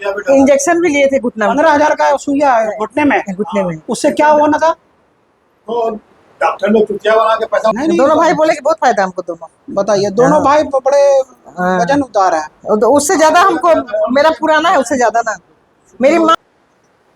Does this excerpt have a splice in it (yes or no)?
yes